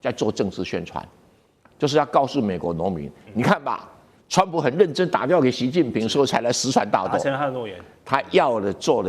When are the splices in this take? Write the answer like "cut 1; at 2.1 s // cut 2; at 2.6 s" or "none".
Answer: none